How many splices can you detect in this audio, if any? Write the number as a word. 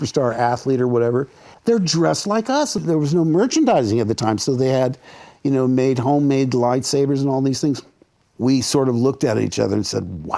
zero